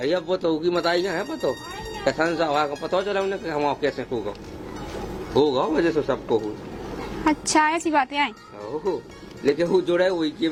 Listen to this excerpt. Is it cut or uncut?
uncut